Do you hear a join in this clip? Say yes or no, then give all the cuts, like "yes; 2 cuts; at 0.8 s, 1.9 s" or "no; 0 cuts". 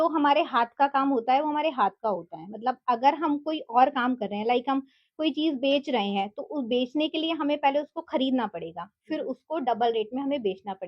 no; 0 cuts